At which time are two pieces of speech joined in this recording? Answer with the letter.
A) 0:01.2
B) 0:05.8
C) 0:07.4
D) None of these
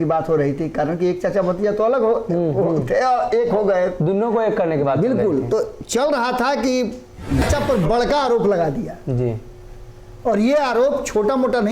C